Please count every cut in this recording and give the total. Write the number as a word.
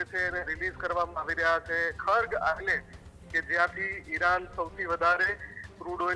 one